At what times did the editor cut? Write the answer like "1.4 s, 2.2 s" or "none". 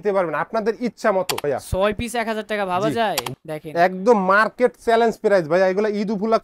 1.4 s, 3.3 s